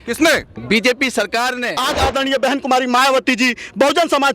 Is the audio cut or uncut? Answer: cut